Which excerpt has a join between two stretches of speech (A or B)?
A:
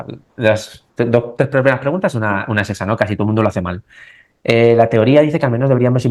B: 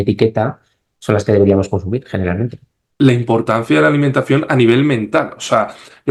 B